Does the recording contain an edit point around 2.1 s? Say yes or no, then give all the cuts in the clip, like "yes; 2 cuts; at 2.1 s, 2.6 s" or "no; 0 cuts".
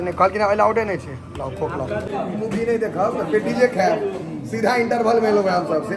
yes; 1 cut; at 2.1 s